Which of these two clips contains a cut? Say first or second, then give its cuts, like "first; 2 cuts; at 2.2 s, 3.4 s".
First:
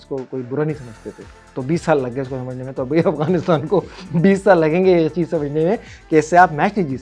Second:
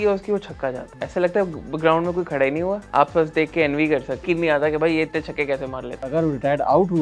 second; 4 cuts; at 1.0 s, 2.8 s, 4.2 s, 6.1 s